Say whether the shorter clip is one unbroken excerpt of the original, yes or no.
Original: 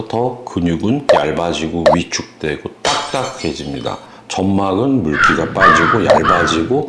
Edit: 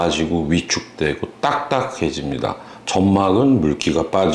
yes